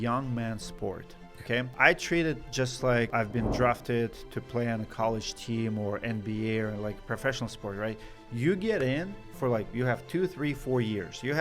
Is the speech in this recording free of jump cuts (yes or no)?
no